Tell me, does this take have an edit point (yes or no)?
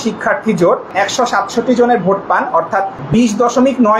yes